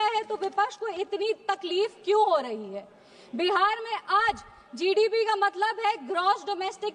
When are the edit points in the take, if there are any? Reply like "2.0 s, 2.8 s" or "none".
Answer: none

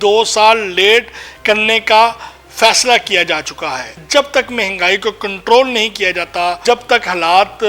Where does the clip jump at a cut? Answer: 4.0 s, 6.6 s

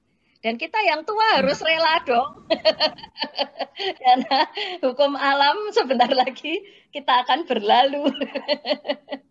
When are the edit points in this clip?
none

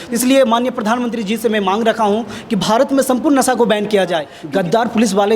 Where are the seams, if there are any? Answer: 4.4 s

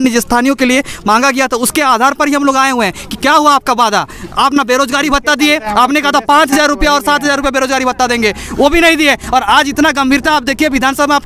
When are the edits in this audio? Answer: none

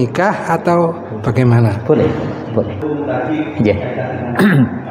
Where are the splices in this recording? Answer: 2.8 s

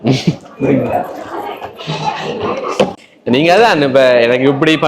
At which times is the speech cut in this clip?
3.0 s

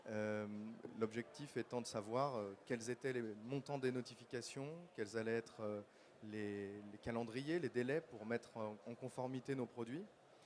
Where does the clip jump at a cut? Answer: 3.4 s

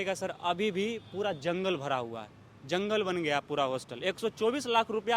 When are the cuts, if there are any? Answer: none

